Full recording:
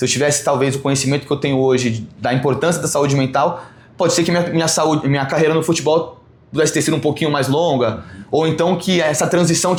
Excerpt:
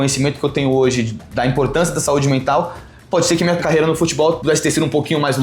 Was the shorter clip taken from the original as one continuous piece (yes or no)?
no